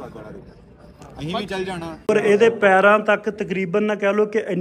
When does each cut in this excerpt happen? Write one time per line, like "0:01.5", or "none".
0:02.1